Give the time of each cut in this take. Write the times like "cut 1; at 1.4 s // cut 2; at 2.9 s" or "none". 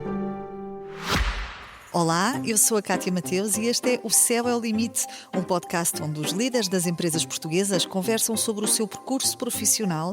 cut 1; at 1.0 s